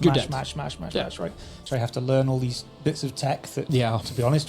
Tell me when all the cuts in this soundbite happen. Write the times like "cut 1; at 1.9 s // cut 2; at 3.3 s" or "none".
cut 1; at 1.7 s

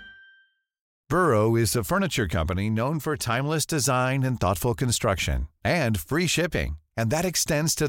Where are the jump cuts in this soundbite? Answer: cut 1; at 0.9 s

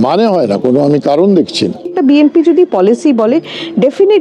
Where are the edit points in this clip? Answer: cut 1; at 1.9 s

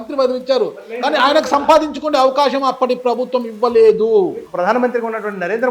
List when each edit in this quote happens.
cut 1; at 4.4 s

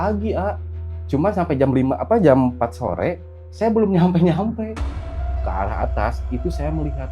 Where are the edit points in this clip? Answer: cut 1; at 5.3 s

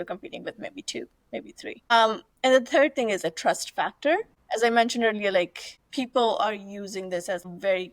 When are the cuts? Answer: none

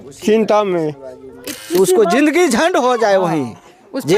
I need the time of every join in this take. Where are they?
cut 1; at 1.5 s

